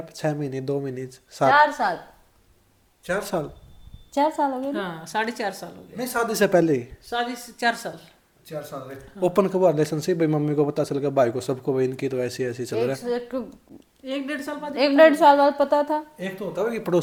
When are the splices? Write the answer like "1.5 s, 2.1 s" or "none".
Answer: none